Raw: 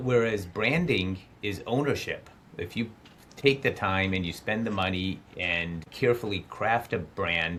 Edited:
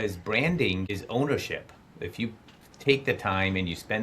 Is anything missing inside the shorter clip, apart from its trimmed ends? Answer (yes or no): yes